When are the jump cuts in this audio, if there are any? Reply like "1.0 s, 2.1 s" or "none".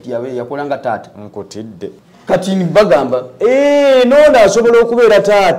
2.1 s